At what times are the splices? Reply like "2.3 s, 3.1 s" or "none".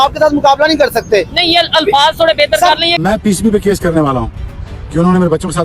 3.0 s